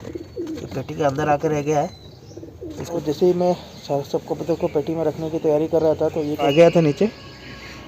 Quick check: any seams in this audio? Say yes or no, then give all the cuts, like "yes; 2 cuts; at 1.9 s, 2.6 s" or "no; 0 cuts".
yes; 2 cuts; at 3.0 s, 6.5 s